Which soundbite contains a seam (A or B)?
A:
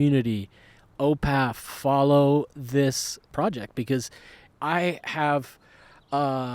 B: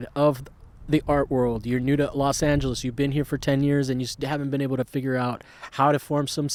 A